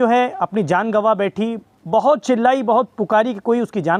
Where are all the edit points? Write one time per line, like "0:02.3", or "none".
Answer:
none